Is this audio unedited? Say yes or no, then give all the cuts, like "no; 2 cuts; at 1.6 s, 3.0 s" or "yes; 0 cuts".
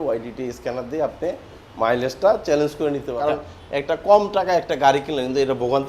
no; 1 cut; at 3.1 s